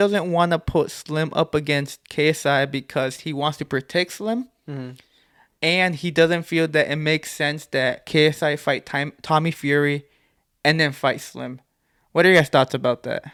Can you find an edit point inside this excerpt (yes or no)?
no